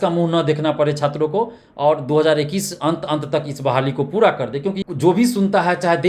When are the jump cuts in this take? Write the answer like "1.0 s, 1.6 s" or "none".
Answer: 4.8 s